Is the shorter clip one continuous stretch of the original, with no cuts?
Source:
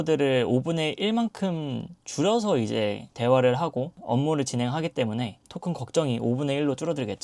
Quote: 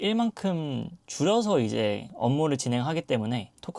no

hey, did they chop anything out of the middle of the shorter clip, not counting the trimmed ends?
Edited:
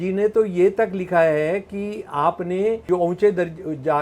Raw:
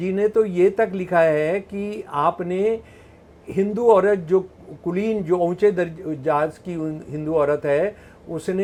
yes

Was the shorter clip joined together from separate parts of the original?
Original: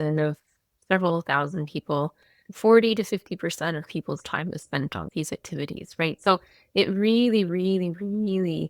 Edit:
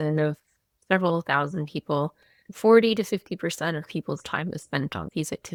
no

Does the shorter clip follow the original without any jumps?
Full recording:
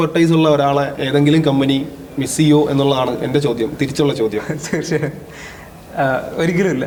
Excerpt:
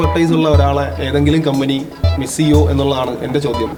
yes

